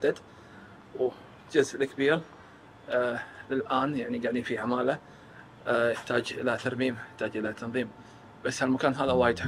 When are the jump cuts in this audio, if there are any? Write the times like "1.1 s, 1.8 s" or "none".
none